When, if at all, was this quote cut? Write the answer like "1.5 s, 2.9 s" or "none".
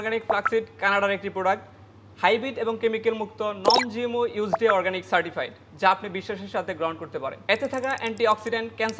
7.4 s